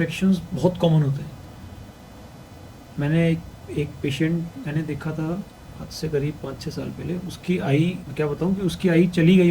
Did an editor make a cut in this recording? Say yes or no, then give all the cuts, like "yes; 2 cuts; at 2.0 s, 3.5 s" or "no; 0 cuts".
yes; 1 cut; at 8.0 s